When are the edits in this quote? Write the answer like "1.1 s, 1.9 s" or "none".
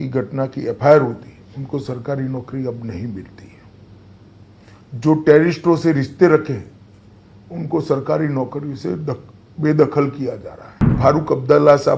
10.9 s